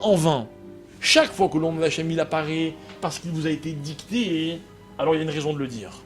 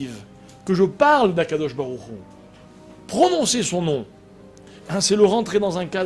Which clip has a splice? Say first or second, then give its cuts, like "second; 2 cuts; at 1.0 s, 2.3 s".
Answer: first; 1 cut; at 1.0 s